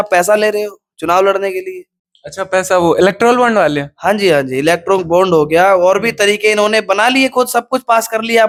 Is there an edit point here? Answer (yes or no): no